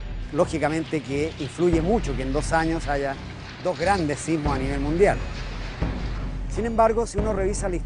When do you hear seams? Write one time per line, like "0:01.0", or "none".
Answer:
0:05.5